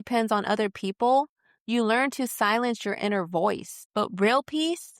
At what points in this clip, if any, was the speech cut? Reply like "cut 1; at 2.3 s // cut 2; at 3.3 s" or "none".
cut 1; at 3.8 s